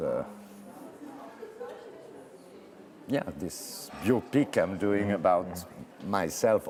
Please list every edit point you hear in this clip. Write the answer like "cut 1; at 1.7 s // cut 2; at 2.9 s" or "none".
none